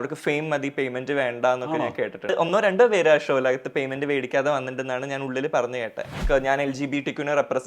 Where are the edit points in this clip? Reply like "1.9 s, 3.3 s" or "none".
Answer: 2.3 s, 6.2 s